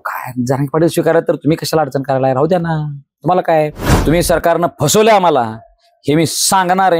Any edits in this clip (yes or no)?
yes